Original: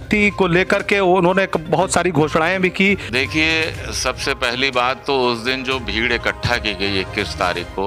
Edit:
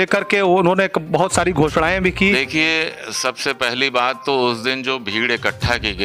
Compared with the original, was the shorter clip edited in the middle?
yes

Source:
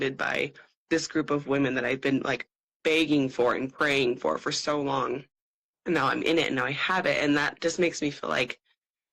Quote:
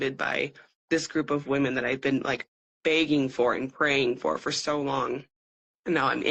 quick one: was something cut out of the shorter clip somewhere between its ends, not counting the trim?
no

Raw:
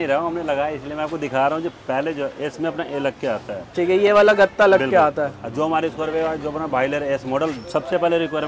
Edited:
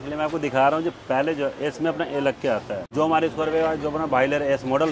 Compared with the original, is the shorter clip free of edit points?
no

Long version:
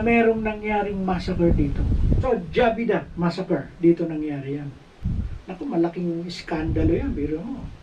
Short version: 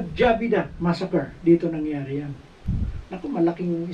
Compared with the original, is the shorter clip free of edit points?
yes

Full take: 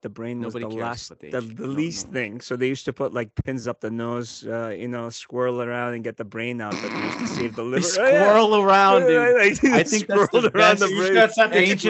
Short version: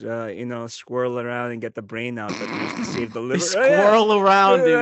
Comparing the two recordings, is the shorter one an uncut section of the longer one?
yes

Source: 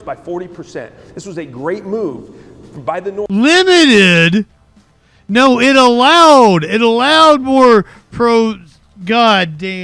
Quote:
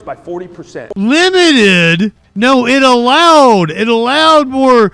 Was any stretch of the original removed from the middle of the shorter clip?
yes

